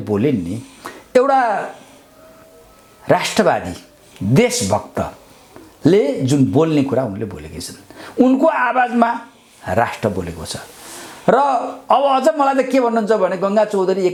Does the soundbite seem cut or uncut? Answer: uncut